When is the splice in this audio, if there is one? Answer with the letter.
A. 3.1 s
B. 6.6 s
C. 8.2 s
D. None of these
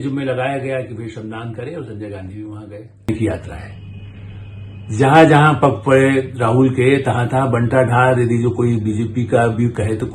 A